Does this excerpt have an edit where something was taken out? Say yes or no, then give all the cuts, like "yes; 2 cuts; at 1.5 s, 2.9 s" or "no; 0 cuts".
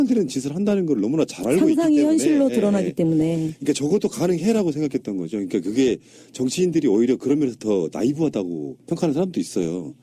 no; 0 cuts